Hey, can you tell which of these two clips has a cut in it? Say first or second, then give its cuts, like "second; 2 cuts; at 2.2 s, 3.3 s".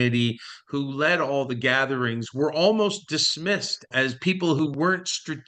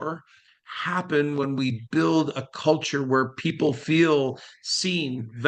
first; 1 cut; at 3.9 s